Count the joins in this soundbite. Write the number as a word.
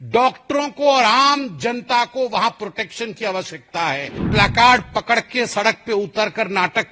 one